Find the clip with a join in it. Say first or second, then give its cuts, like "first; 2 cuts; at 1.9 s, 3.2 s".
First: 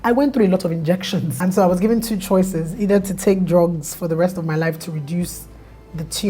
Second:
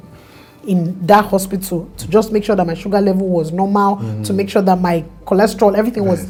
first; 1 cut; at 1.3 s